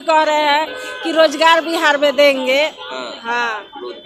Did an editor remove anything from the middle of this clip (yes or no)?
no